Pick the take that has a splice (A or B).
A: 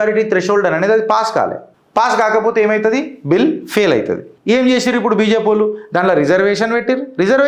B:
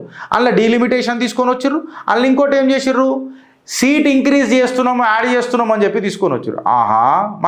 A